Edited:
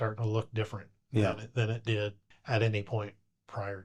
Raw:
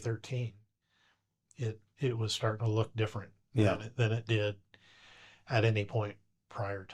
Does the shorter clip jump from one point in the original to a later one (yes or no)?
yes